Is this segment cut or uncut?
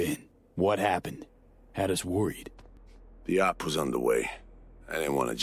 uncut